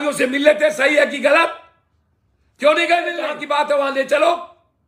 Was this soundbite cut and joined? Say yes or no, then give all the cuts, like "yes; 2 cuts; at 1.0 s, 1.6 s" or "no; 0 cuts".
yes; 1 cut; at 3.3 s